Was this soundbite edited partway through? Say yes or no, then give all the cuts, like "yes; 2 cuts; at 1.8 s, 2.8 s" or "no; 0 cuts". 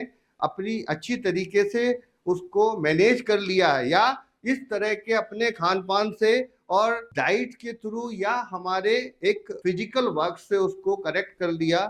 no; 0 cuts